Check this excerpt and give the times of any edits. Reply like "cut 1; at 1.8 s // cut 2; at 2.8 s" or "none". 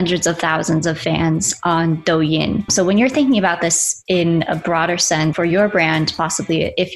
cut 1; at 2.7 s // cut 2; at 5.3 s